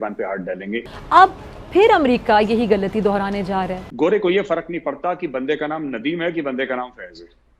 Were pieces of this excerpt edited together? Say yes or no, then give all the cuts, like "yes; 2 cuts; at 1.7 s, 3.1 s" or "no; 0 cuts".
yes; 2 cuts; at 0.9 s, 3.8 s